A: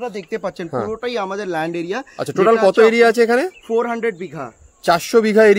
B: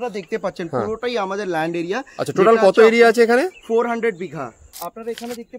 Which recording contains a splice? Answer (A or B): B